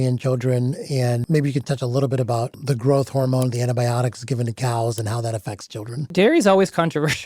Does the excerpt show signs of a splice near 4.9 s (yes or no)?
no